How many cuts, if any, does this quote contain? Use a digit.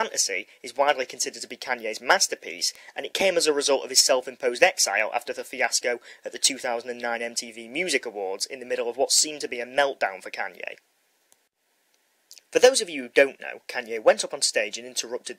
1